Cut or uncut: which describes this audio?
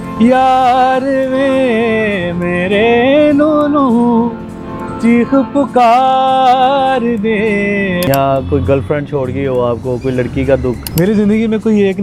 cut